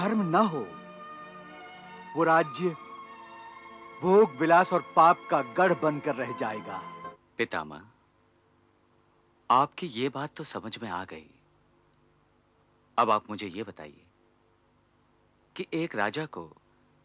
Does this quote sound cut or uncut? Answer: cut